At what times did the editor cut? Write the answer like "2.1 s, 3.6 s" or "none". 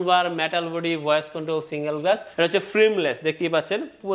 2.3 s